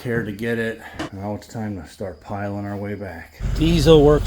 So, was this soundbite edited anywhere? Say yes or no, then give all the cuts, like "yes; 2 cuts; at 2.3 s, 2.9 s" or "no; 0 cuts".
yes; 2 cuts; at 1.1 s, 3.4 s